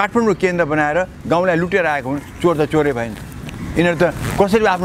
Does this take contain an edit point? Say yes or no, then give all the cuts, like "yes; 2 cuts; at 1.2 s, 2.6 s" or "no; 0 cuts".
no; 0 cuts